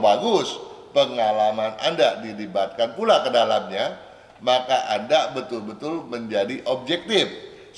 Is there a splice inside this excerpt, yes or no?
no